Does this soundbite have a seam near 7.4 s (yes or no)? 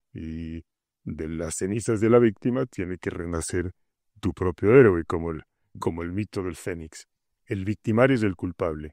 yes